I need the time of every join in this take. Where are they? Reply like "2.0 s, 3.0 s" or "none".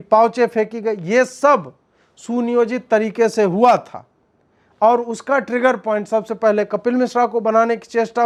none

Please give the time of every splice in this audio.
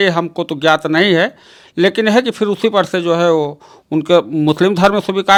none

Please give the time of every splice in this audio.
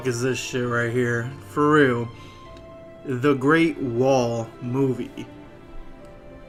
none

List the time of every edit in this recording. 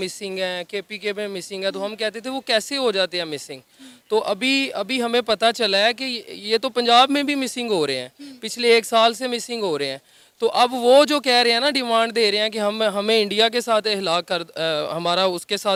none

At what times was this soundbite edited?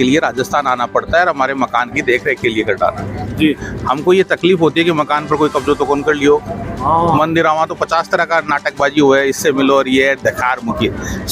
none

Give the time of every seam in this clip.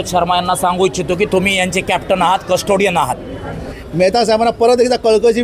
3.8 s

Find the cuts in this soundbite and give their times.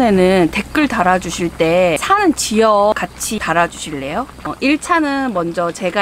2.0 s, 2.9 s, 4.5 s

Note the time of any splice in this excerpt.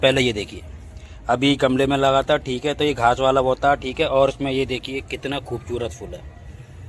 none

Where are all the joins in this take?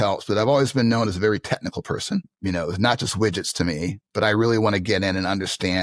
2.3 s

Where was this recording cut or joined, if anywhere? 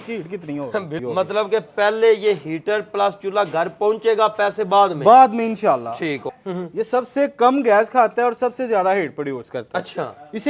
1.0 s, 6.3 s

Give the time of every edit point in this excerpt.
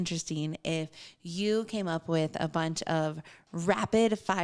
none

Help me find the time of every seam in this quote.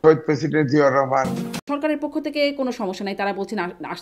1.5 s

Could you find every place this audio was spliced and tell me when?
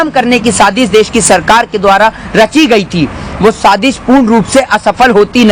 none

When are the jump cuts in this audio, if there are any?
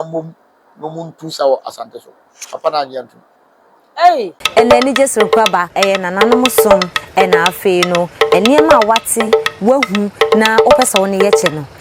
4.4 s

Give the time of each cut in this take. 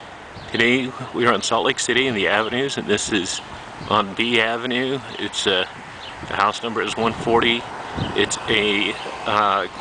none

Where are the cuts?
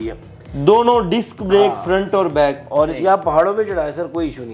2.9 s

